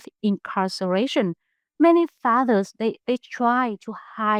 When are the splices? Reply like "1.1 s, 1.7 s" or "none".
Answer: none

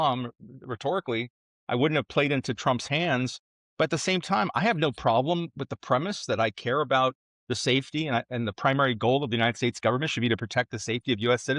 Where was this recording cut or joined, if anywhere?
none

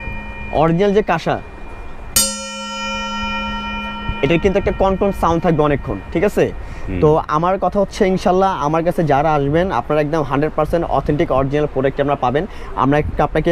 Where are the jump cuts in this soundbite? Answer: none

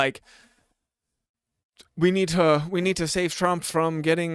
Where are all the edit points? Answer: none

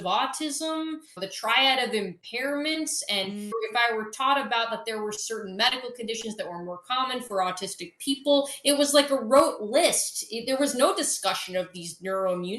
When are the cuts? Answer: 1.1 s, 3.5 s

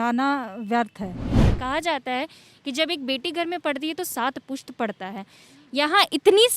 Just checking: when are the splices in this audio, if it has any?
1.6 s

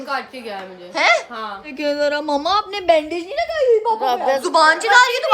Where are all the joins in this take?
1.7 s, 4.4 s

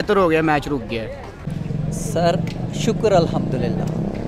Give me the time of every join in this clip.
1.3 s

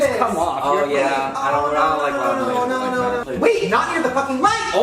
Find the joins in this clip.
none

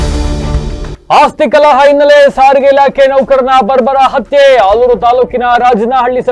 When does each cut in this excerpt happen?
0.9 s

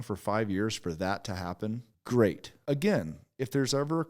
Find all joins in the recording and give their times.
1.9 s, 2.5 s

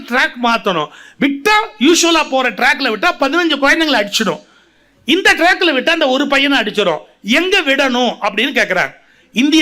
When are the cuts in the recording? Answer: none

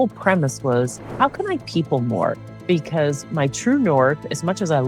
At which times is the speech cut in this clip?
2.5 s

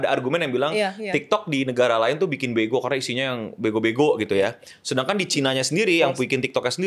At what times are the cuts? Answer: none

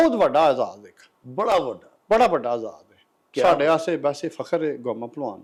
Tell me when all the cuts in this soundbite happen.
none

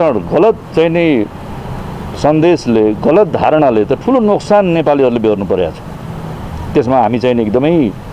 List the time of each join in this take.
none

